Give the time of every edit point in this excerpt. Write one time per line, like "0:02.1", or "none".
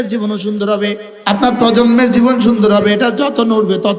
0:01.1